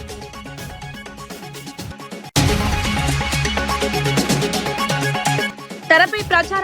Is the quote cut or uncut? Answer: cut